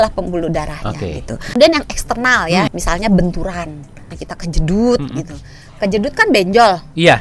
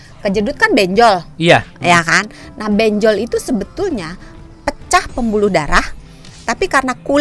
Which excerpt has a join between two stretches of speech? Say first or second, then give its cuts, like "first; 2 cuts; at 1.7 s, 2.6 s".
first; 3 cuts; at 1.5 s, 2.7 s, 4.1 s